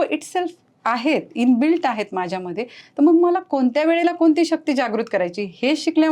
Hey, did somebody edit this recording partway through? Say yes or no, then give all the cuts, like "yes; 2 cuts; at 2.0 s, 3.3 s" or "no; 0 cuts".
no; 0 cuts